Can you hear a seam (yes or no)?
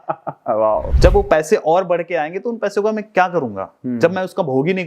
yes